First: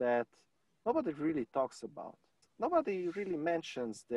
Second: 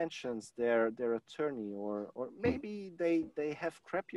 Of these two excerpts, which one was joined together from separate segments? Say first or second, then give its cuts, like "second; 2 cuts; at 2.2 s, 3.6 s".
first; 1 cut; at 2.3 s